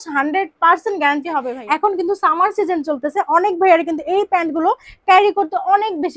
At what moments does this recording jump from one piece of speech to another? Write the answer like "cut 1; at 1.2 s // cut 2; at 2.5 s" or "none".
cut 1; at 1.5 s